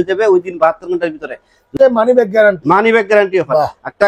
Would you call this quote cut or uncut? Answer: cut